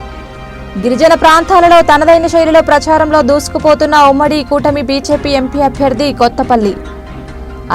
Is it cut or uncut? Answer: uncut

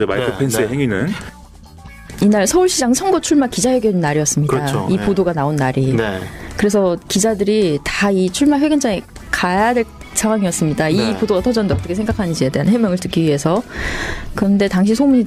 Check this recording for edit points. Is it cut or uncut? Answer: cut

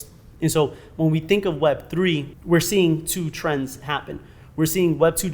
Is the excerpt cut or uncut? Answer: cut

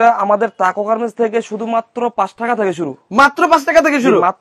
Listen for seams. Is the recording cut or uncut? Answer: uncut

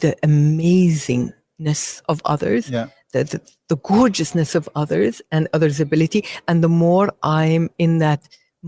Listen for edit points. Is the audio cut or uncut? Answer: uncut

